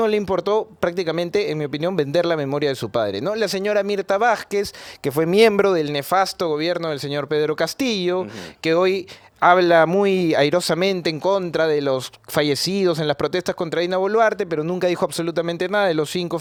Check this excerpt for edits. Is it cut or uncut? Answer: uncut